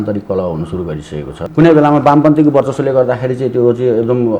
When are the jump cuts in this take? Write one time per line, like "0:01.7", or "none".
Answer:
0:01.3